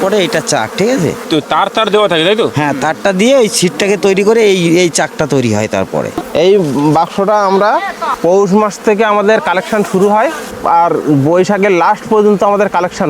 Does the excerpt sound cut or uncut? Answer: cut